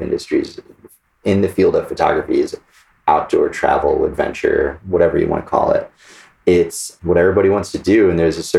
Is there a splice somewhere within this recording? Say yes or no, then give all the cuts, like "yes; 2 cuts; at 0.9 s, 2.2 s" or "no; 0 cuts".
yes; 2 cuts; at 1.1 s, 6.9 s